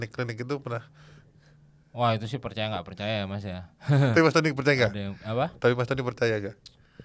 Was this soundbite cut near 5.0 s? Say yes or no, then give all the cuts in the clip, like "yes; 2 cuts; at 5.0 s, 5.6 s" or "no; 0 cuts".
no; 0 cuts